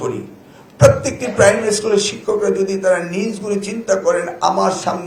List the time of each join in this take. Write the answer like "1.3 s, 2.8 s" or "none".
none